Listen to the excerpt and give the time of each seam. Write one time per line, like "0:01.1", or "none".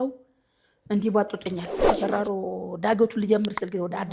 0:01.8